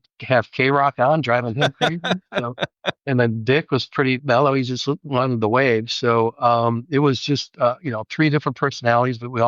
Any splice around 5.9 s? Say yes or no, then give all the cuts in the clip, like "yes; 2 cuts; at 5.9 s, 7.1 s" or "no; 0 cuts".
no; 1 cut; at 2.9 s